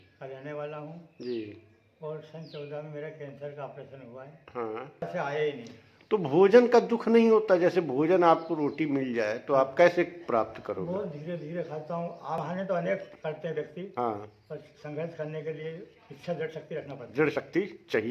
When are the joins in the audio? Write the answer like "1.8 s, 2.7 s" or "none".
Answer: 5.1 s, 12.4 s